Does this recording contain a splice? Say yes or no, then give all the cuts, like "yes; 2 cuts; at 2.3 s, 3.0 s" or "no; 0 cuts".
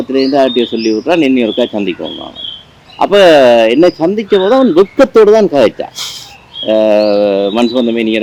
no; 0 cuts